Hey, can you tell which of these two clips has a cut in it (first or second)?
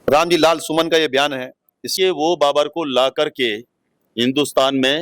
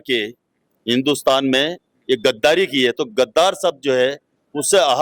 first